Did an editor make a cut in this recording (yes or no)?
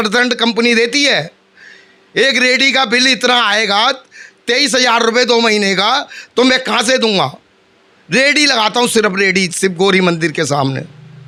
no